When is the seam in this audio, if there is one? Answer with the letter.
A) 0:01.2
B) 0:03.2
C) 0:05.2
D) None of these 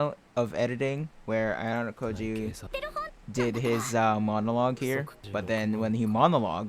C